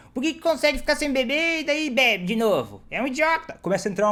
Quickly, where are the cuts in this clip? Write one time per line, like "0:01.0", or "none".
none